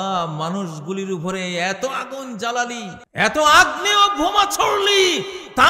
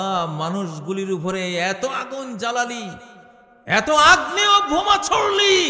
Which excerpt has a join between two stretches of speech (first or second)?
first